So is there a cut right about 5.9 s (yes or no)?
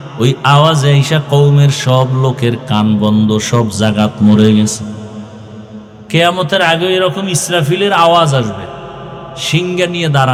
no